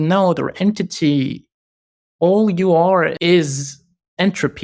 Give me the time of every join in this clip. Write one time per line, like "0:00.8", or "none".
0:03.2